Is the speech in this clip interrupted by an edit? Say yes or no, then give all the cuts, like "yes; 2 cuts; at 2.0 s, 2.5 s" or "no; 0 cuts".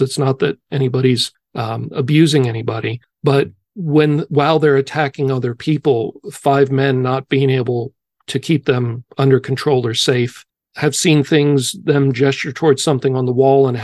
yes; 1 cut; at 10.4 s